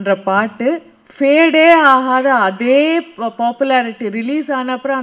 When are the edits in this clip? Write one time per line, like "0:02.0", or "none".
0:01.0